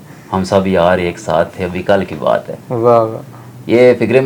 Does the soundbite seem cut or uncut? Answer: uncut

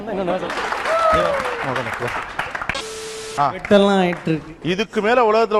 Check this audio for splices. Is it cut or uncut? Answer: cut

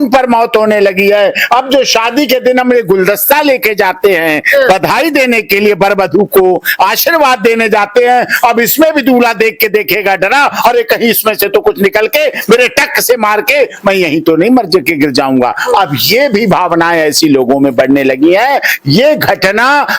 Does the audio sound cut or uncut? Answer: uncut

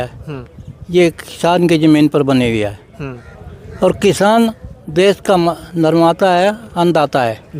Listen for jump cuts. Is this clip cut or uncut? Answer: uncut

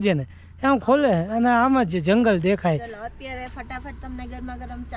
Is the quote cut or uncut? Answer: uncut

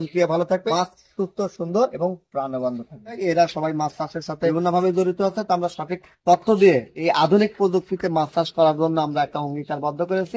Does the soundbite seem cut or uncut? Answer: cut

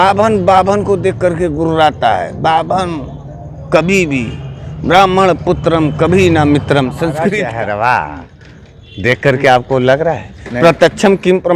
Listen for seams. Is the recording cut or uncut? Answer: cut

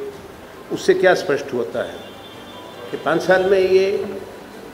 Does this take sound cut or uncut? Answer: uncut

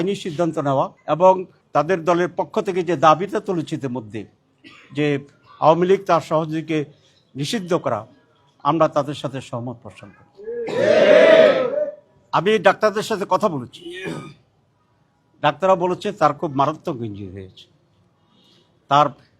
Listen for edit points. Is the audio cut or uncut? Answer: cut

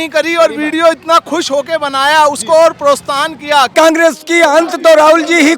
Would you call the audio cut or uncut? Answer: cut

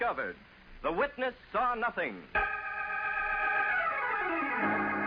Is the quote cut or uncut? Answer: cut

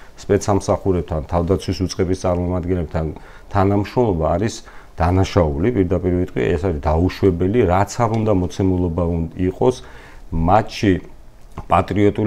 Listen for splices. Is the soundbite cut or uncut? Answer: uncut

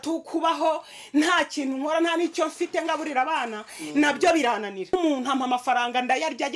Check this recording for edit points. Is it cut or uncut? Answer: cut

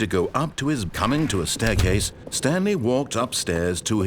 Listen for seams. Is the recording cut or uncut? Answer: cut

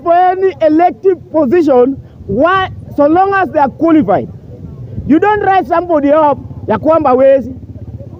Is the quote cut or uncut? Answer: uncut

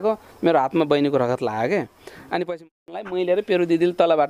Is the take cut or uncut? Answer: cut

